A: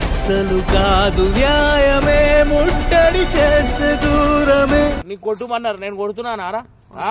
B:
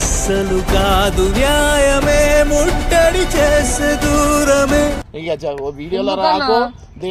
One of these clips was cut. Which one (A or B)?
A